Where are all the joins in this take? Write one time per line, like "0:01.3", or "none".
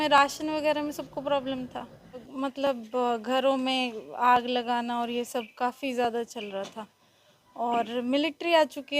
0:02.3